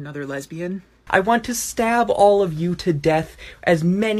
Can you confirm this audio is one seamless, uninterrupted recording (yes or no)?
no